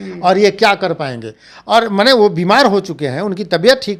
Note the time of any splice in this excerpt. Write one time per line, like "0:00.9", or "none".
none